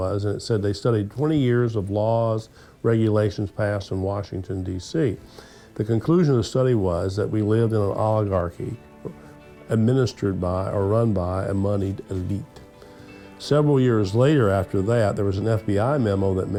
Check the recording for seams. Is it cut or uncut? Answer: uncut